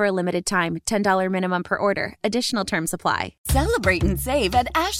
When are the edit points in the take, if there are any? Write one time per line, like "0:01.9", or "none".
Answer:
0:03.3